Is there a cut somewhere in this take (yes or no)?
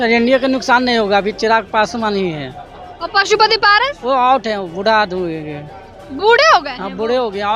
no